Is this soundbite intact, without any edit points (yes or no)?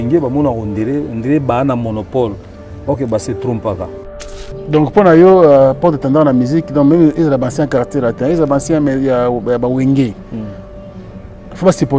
no